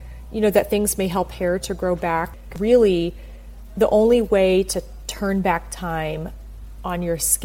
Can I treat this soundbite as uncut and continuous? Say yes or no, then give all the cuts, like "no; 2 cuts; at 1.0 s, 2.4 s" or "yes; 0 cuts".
no; 1 cut; at 2.5 s